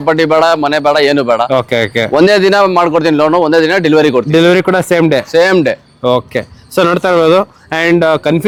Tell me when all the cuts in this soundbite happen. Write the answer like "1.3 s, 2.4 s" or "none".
none